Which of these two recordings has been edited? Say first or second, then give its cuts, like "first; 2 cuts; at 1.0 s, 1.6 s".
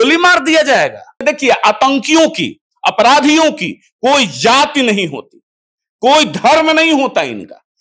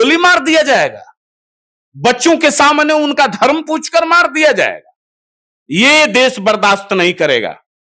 first; 1 cut; at 1.2 s